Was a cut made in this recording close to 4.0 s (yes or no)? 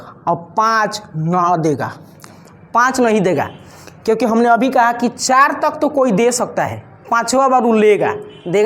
no